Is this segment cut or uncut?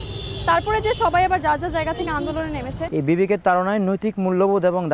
cut